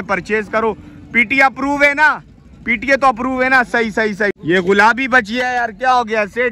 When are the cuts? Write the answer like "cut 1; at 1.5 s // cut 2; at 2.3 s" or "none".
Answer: cut 1; at 4.4 s